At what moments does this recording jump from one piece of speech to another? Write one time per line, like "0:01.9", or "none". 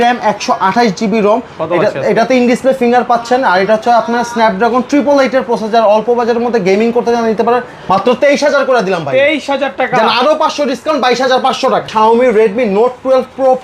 0:07.7
0:11.9